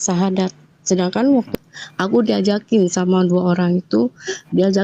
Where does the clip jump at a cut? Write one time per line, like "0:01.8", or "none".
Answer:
0:01.5

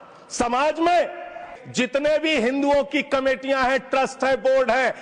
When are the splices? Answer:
0:01.5

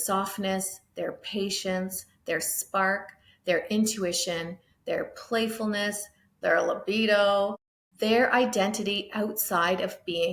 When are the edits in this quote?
none

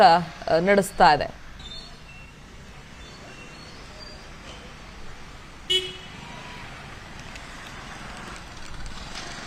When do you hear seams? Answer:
none

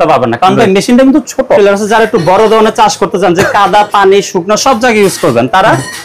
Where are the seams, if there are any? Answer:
0:01.6

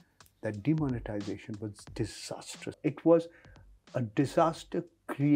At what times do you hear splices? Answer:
0:02.8

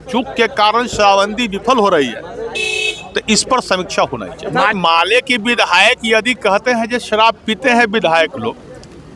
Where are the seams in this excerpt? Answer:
0:04.7

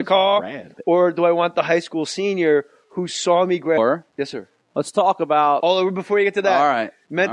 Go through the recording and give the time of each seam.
none

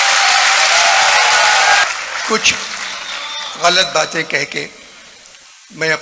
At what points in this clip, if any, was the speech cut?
0:01.8

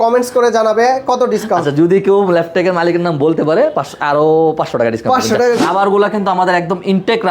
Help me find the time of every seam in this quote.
0:05.6

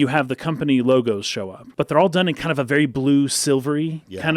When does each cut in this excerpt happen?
0:01.6

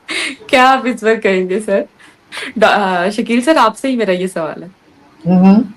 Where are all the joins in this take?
none

